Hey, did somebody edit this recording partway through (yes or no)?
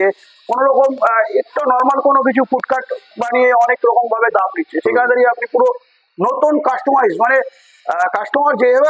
no